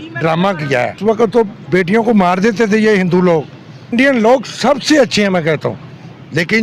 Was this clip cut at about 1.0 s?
yes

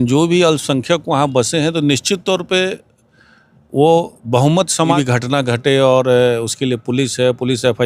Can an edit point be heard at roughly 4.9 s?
yes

